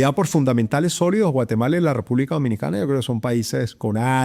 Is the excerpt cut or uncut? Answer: uncut